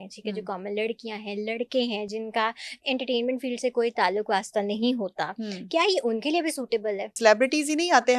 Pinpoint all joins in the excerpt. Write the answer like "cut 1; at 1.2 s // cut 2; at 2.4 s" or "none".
cut 1; at 7.1 s